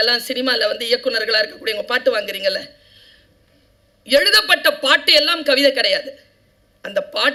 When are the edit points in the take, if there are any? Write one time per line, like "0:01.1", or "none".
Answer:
none

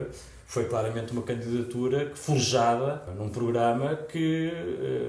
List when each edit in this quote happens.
0:03.2

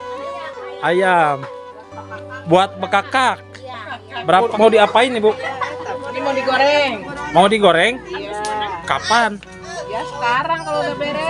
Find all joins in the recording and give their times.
0:04.5

